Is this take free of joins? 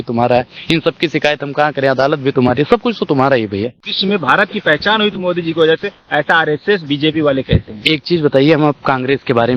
yes; 0 cuts

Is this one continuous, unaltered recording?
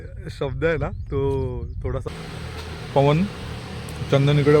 no; 1 cut; at 2.0 s

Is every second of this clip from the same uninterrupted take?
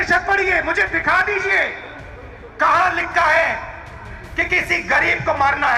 yes; 0 cuts

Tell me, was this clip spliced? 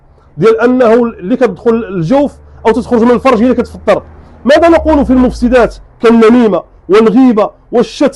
no; 0 cuts

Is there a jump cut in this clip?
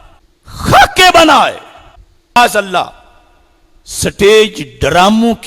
yes; 1 cut; at 2.4 s

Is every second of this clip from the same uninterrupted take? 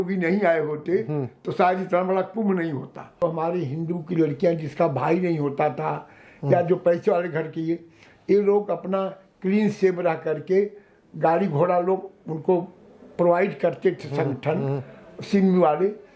no; 1 cut; at 3.1 s

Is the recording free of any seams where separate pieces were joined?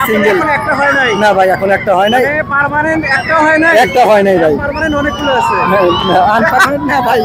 yes; 0 cuts

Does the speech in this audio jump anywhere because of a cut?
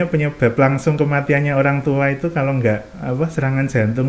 no; 0 cuts

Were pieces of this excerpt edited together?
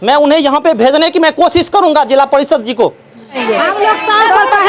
yes; 1 cut; at 3.4 s

